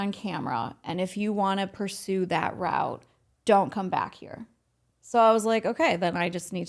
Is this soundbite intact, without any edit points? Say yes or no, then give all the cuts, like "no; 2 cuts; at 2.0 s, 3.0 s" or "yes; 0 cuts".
yes; 0 cuts